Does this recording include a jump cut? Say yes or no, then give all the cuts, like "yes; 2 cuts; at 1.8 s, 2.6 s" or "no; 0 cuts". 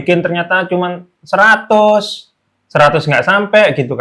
no; 0 cuts